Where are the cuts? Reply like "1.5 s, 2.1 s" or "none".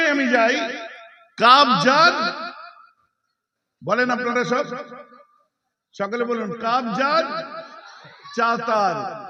none